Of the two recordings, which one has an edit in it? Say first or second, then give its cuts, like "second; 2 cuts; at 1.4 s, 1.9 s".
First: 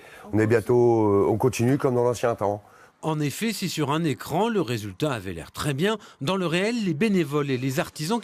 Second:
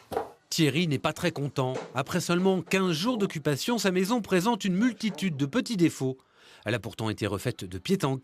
second; 1 cut; at 4.5 s